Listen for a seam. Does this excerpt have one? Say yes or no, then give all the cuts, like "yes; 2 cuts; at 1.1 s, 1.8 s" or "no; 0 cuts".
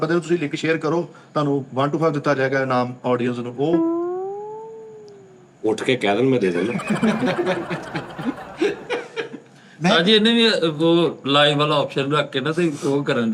no; 0 cuts